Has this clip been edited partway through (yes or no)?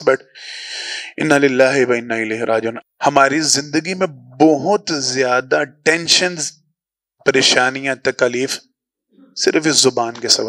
yes